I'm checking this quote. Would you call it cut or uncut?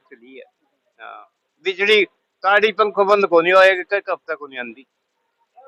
uncut